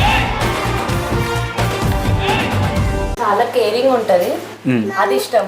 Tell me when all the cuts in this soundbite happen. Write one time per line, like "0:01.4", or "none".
0:03.1